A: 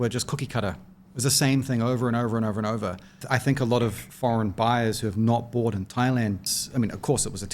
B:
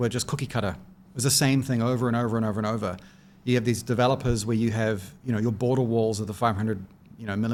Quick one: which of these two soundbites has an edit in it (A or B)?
A